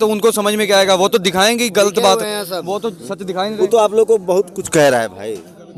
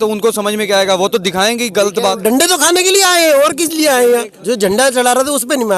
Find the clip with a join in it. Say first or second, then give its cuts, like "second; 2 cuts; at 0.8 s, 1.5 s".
second; 2 cuts; at 2.2 s, 4.3 s